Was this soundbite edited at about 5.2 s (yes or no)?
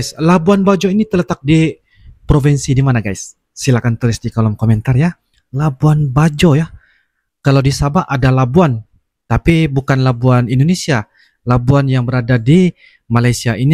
no